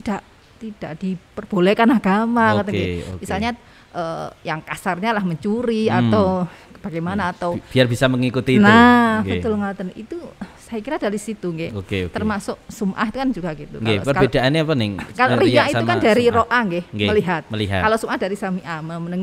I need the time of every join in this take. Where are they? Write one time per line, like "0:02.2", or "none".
none